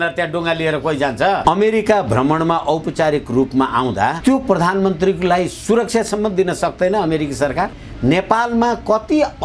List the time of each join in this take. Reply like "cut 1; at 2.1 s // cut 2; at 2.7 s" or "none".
cut 1; at 1.4 s // cut 2; at 4.2 s // cut 3; at 7.8 s